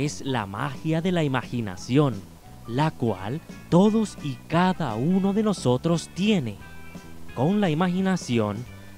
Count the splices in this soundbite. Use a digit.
1